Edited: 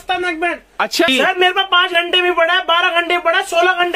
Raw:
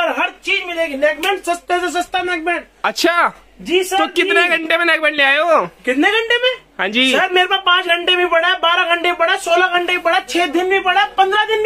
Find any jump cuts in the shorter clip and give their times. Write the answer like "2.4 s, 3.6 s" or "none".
1.1 s